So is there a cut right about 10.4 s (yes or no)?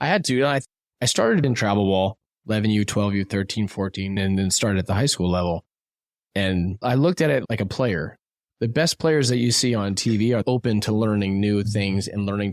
yes